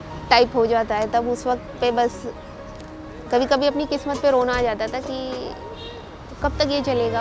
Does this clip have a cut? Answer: no; 0 cuts

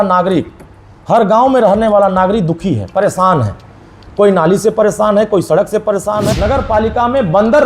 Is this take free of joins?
no; 1 cut; at 6.2 s

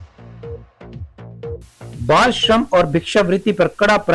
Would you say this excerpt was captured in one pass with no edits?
no; 1 cut; at 1.9 s

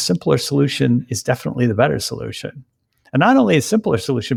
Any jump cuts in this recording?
no; 0 cuts

